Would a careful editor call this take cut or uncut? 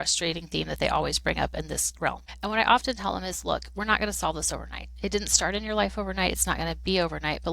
cut